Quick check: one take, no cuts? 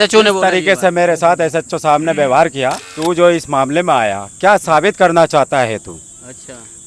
no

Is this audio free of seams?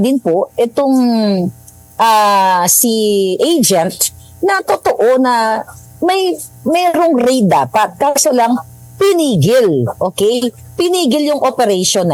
yes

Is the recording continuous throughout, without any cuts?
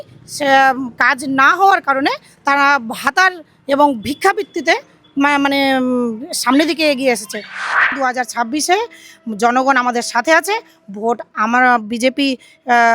no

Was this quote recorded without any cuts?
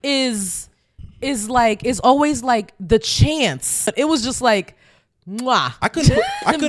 no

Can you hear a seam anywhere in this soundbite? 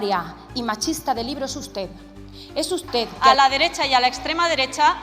yes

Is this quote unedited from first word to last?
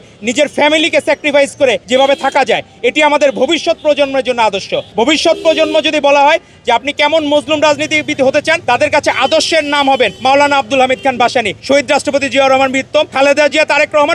no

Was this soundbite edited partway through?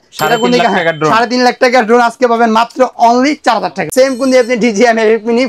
yes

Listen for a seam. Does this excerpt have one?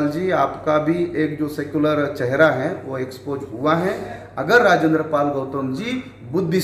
yes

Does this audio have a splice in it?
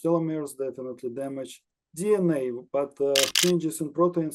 yes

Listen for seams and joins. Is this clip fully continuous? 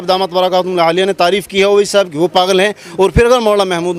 yes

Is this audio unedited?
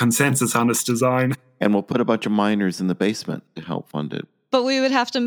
no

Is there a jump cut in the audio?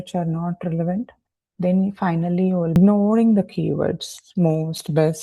yes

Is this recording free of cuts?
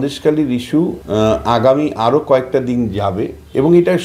no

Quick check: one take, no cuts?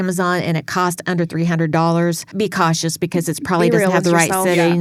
yes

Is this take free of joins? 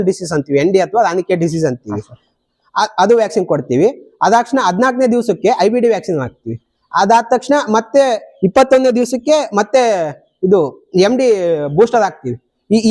yes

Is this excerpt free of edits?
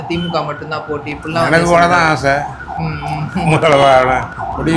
yes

